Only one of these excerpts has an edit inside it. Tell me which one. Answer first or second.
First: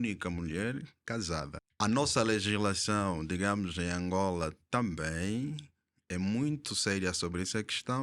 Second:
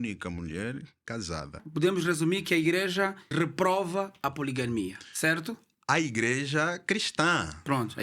second